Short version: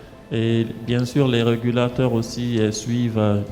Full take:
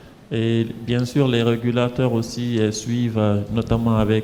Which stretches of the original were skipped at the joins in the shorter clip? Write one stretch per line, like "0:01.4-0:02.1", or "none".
none